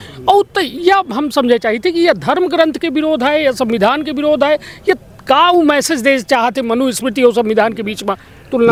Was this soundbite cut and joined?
no; 0 cuts

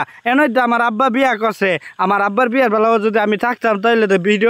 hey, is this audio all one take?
yes; 0 cuts

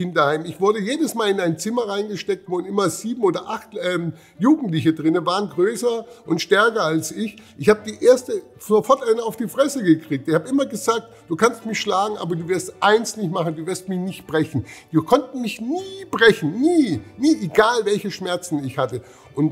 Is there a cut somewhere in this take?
no; 0 cuts

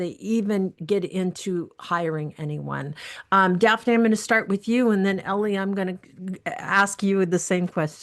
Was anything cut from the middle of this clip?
no; 0 cuts

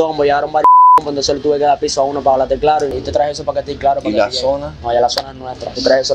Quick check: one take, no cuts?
yes; 0 cuts

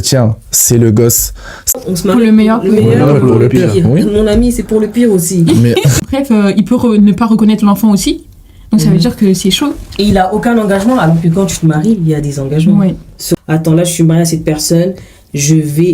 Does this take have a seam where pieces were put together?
yes; 3 cuts; at 1.8 s, 6.0 s, 13.4 s

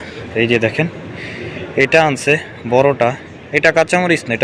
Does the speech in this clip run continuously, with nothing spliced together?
yes; 0 cuts

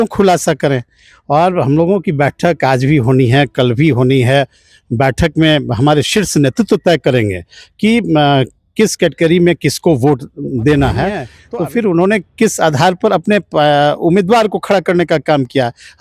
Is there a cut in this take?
yes; 1 cut; at 11.3 s

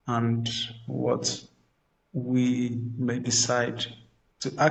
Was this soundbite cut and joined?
no; 0 cuts

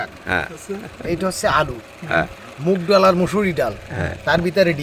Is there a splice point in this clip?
no; 0 cuts

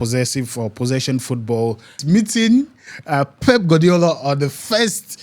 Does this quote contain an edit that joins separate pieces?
yes; 1 cut; at 2.0 s

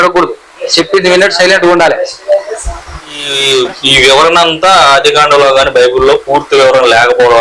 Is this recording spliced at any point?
yes; 1 cut; at 3.3 s

